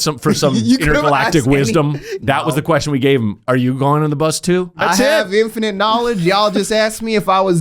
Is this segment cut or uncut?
cut